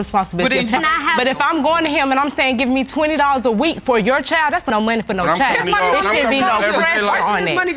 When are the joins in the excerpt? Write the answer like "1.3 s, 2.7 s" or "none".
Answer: none